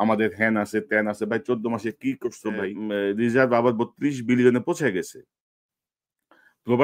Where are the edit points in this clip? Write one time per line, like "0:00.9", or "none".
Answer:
0:02.8